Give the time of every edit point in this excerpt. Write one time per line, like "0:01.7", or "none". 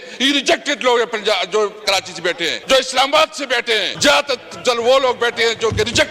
0:02.5
0:03.9